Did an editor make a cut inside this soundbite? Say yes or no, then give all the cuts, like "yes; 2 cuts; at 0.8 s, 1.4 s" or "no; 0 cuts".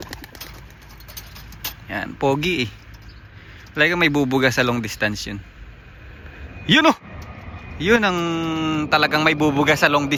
no; 0 cuts